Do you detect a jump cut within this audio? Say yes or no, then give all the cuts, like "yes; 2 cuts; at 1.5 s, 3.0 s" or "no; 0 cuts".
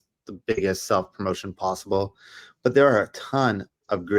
no; 0 cuts